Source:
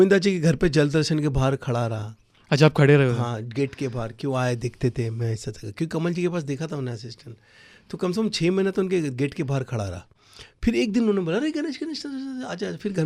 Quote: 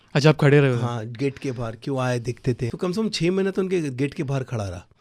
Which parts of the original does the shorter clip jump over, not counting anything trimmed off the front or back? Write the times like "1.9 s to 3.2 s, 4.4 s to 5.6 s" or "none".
5.1 s to 7.9 s